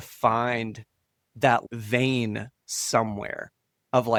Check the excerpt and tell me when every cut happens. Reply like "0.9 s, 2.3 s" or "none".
none